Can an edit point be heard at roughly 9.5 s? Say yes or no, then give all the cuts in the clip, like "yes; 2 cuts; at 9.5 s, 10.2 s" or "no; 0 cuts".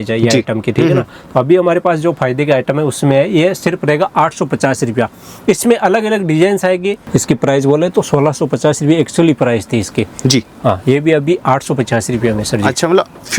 no; 1 cut; at 7.0 s